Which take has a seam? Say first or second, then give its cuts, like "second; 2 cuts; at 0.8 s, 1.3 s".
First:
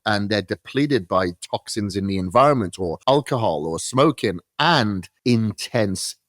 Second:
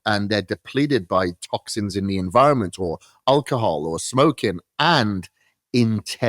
first; 2 cuts; at 2.9 s, 5.1 s